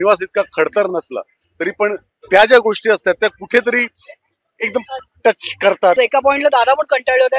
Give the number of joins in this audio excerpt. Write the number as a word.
one